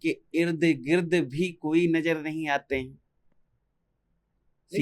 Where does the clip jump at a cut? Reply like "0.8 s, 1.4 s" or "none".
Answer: none